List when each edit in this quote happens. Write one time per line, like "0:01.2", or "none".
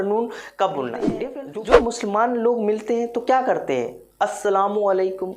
0:01.2

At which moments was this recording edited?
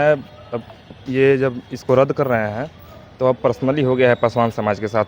none

